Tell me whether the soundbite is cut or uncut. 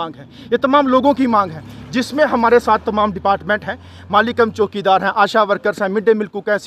uncut